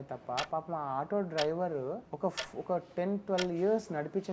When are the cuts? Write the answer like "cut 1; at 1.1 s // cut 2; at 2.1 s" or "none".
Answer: cut 1; at 2.1 s

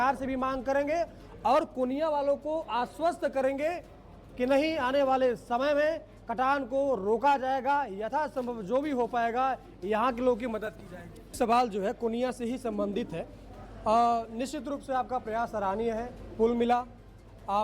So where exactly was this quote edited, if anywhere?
cut 1; at 11.4 s

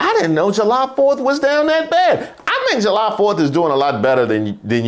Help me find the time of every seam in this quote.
none

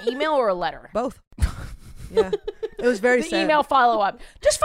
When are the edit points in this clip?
none

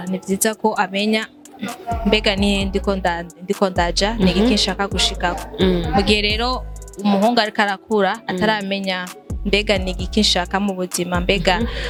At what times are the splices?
none

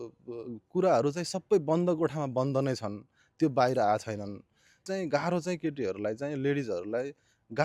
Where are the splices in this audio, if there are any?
cut 1; at 4.8 s

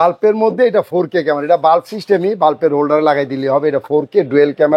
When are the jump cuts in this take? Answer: none

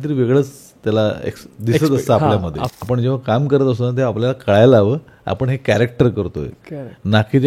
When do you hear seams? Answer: cut 1; at 2.7 s

